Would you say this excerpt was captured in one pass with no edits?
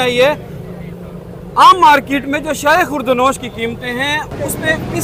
yes; 0 cuts

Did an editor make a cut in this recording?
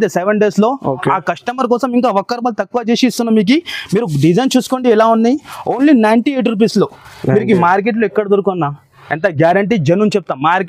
no; 0 cuts

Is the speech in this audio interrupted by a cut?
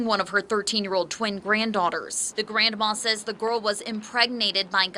yes; 1 cut; at 2.2 s

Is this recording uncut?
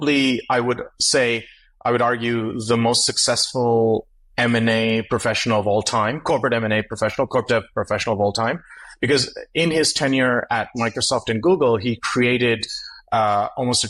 yes; 0 cuts

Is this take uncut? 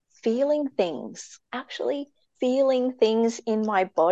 no; 2 cuts; at 1.3 s, 2.2 s

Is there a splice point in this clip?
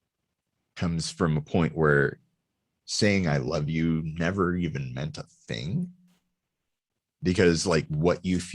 no; 0 cuts

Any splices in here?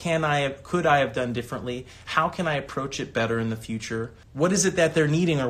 yes; 1 cut; at 4.2 s

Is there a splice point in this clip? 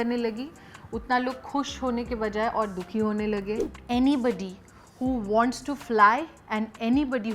yes; 1 cut; at 3.6 s

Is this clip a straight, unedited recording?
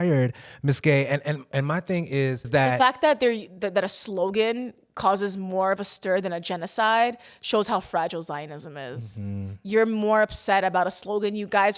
no; 1 cut; at 2.5 s

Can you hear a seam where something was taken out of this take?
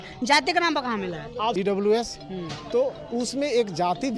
yes; 1 cut; at 1.5 s

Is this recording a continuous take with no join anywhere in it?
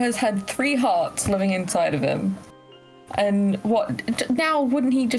yes; 0 cuts

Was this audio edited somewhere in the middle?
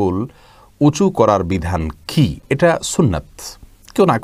no; 0 cuts

